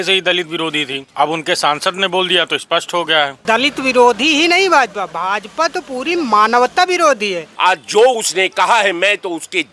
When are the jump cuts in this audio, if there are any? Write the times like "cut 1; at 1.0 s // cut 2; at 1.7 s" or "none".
cut 1; at 1.0 s // cut 2; at 3.4 s // cut 3; at 7.4 s